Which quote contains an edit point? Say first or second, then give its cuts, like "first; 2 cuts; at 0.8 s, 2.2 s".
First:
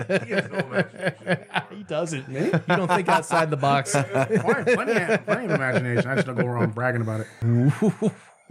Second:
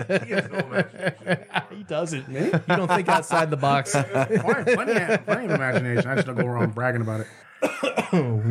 first; 1 cut; at 7.4 s